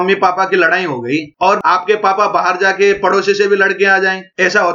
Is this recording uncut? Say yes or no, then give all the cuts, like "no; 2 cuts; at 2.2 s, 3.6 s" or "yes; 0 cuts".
yes; 0 cuts